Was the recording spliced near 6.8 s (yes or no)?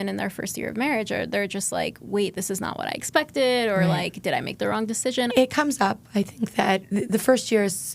yes